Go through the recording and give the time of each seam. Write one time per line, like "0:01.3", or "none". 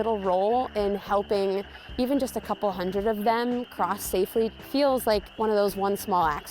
0:04.6
0:05.3